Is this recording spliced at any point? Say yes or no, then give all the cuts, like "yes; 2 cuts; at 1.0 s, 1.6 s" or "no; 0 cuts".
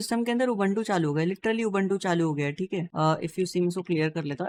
no; 0 cuts